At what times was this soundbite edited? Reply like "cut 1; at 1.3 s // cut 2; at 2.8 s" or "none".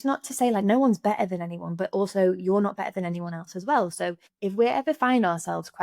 cut 1; at 4.3 s

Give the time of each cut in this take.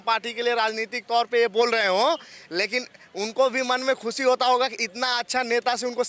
none

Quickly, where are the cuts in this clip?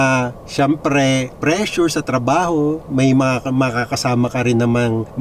none

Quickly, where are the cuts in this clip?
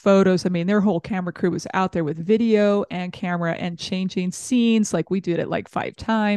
none

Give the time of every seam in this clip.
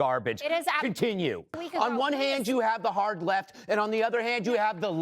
cut 1; at 1.6 s

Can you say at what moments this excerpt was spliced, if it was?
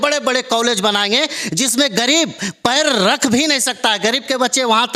none

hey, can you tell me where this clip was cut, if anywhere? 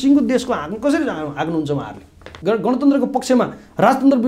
cut 1; at 2.3 s

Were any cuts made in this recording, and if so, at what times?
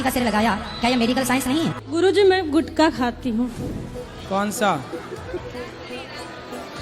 cut 1; at 1.7 s

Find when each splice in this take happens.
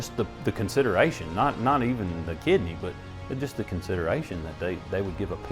none

